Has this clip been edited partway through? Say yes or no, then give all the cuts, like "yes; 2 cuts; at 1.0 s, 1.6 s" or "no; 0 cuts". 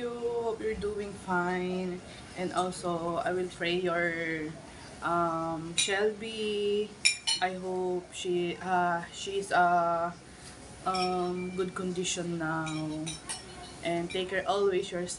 no; 0 cuts